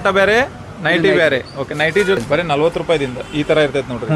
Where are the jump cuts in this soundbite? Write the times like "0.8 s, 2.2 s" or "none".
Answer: 2.2 s